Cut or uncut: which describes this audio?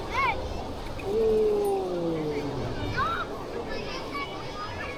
uncut